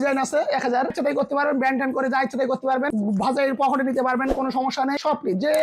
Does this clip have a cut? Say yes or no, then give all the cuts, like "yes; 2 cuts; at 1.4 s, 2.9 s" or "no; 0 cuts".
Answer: yes; 1 cut; at 0.9 s